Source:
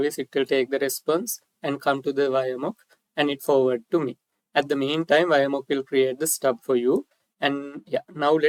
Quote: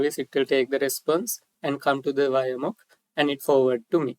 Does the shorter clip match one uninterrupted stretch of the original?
yes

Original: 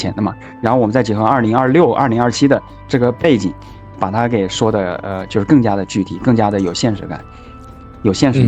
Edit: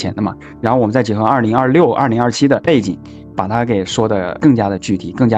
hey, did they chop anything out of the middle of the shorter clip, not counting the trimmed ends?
yes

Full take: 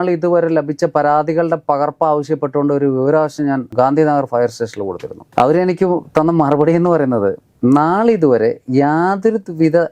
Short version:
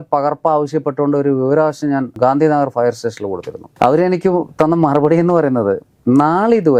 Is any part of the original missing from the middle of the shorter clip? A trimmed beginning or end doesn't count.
no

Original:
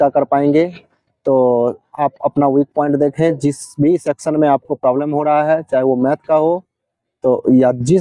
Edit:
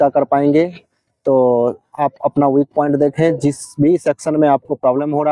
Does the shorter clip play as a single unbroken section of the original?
yes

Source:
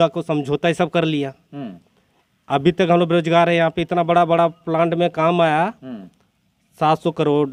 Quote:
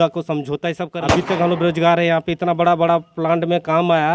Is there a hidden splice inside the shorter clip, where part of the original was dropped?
yes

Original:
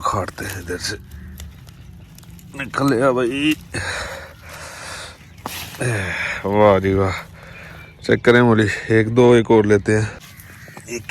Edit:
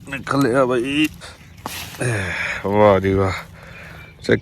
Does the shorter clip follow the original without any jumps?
no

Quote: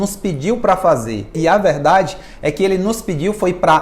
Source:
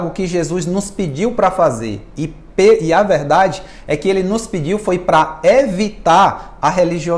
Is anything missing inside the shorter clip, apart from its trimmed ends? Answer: yes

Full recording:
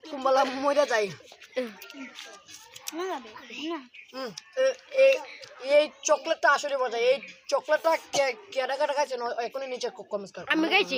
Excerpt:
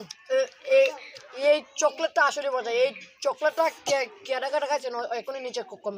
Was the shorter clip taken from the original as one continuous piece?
yes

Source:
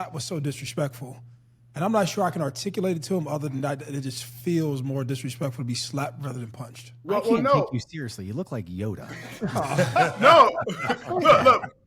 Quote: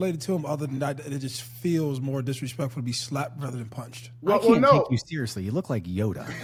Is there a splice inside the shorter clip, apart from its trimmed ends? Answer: no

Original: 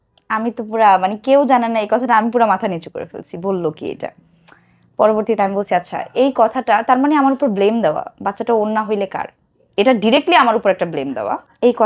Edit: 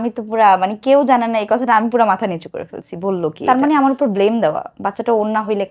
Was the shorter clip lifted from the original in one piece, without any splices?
no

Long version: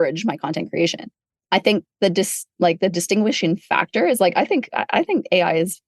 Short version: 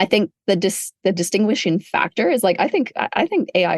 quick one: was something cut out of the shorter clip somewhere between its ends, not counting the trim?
yes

